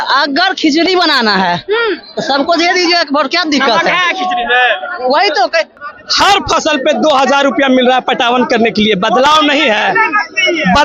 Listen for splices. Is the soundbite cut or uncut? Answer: cut